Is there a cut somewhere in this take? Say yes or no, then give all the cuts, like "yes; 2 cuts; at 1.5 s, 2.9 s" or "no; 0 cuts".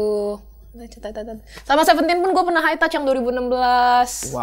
no; 0 cuts